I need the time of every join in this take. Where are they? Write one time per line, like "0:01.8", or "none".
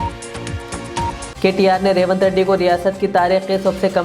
0:01.3